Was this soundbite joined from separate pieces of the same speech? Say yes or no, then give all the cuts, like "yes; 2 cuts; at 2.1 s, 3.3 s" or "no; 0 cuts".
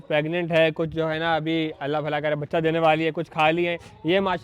no; 0 cuts